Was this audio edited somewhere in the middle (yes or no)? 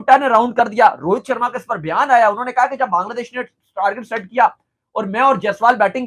no